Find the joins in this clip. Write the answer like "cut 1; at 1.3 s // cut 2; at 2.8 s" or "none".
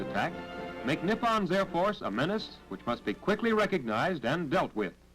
cut 1; at 2.0 s